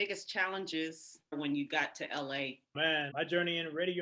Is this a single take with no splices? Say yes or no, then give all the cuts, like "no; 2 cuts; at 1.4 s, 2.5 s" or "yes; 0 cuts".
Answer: no; 2 cuts; at 1.3 s, 3.1 s